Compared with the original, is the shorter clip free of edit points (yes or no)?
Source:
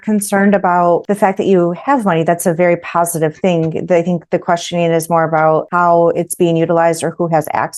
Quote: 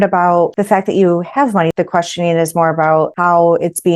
no